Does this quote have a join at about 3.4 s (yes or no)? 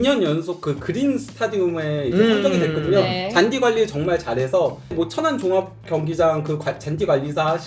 no